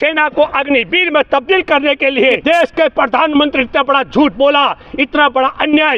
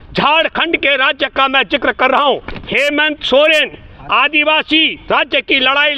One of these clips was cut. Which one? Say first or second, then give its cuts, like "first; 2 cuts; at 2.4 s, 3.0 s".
first; 1 cut; at 2.4 s